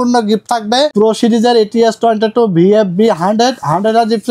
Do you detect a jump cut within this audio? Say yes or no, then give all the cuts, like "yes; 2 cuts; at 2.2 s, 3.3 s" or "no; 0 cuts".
yes; 1 cut; at 0.9 s